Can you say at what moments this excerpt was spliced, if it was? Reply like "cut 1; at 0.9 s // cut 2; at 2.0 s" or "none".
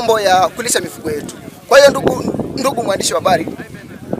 none